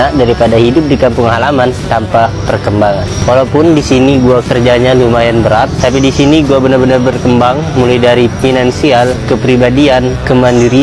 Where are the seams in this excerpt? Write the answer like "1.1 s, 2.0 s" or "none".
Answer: none